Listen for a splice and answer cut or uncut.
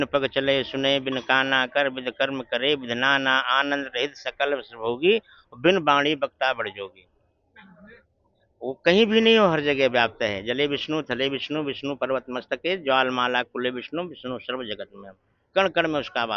uncut